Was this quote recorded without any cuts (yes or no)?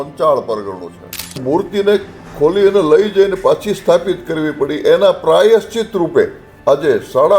no